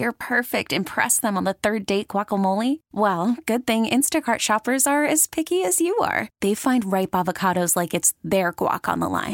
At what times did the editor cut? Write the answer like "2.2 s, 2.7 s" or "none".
none

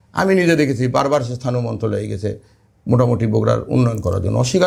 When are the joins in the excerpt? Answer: none

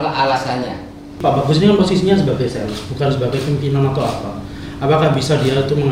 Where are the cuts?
1.2 s

